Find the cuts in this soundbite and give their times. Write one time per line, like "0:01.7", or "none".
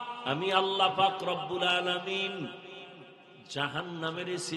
none